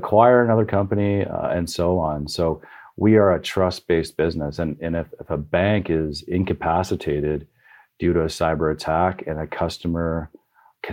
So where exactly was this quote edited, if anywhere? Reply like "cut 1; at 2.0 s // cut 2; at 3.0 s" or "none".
none